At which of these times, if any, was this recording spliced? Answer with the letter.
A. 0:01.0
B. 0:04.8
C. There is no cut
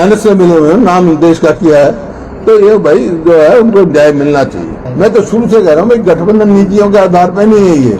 B